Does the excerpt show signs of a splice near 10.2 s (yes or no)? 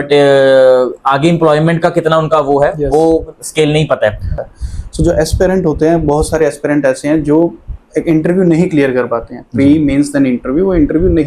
no